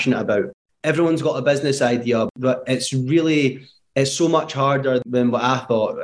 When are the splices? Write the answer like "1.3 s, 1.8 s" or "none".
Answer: 2.3 s, 5.0 s